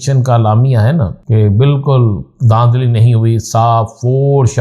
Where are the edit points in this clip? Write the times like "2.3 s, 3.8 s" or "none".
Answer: 1.2 s